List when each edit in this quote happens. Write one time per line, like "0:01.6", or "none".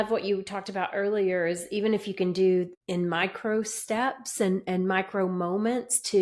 0:02.8